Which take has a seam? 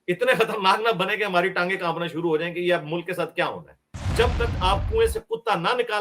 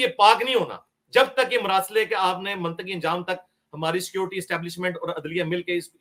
first; 1 cut; at 4.1 s

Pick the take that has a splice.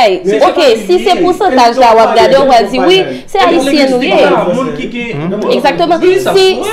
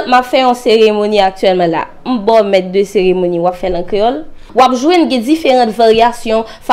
second; 1 cut; at 4.4 s

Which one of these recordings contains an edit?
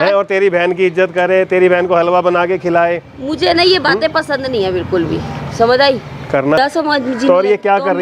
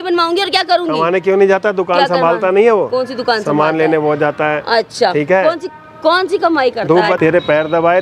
first; 1 cut; at 6.6 s

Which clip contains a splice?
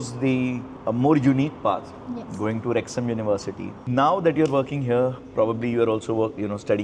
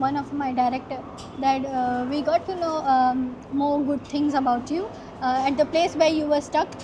first; 1 cut; at 3.8 s

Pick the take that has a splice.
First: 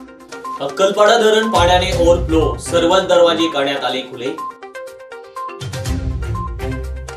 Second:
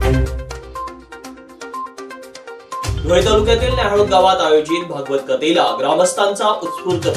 second; 1 cut; at 1.9 s

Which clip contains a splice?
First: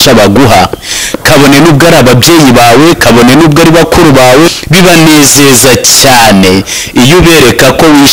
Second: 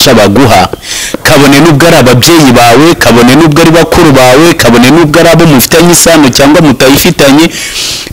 first; 1 cut; at 4.5 s

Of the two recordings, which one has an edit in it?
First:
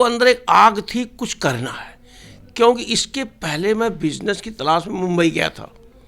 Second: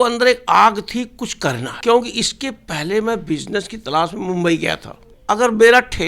second; 2 cuts; at 1.7 s, 5.1 s

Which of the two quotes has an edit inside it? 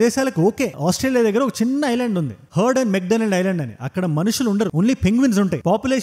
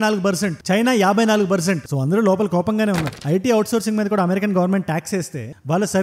second; 1 cut; at 3.1 s

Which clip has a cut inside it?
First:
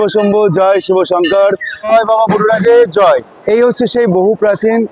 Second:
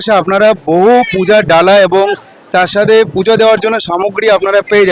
first; 1 cut; at 1.9 s

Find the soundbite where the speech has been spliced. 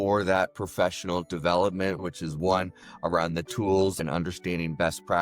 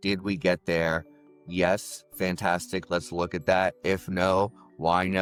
first; 2 cuts; at 2.0 s, 4.0 s

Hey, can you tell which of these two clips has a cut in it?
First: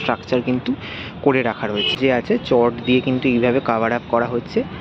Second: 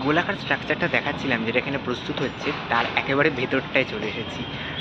first; 1 cut; at 1.9 s

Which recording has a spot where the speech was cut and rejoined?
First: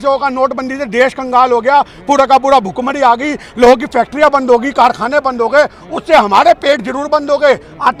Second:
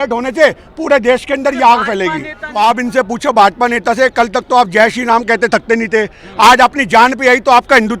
second; 1 cut; at 2.4 s

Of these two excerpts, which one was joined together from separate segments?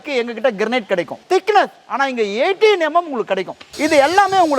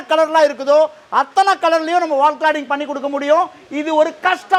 first; 2 cuts; at 1.2 s, 3.7 s

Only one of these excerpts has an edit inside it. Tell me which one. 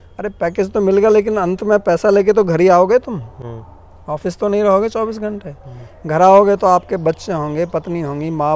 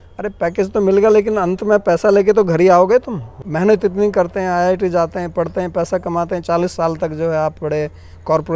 second; 1 cut; at 3.4 s

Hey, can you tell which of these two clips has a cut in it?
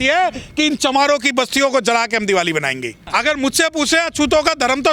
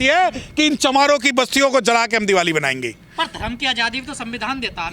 first; 1 cut; at 3.0 s

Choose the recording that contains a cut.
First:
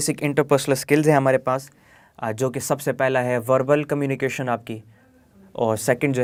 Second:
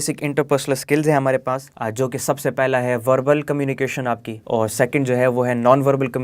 second; 2 cuts; at 1.7 s, 4.3 s

